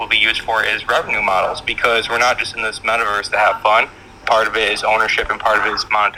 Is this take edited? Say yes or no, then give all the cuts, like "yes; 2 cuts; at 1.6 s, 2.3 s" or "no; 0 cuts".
no; 0 cuts